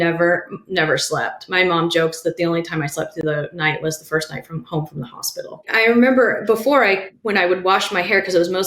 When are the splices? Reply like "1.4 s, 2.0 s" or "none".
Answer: 5.7 s, 7.1 s